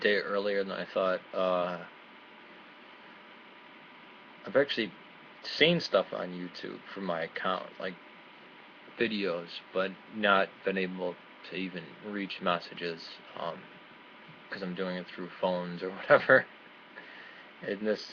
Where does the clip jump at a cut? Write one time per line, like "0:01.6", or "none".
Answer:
0:15.5